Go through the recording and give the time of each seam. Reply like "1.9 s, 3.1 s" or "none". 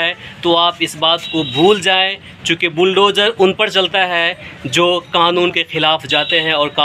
none